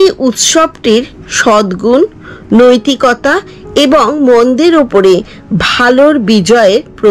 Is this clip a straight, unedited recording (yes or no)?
yes